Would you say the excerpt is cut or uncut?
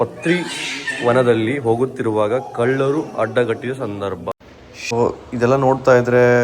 cut